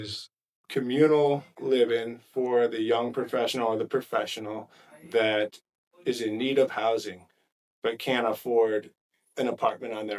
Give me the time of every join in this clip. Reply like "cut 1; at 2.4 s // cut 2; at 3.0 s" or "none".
none